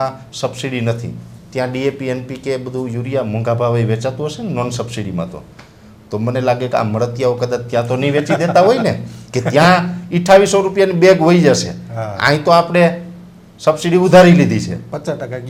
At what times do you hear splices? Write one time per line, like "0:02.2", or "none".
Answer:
none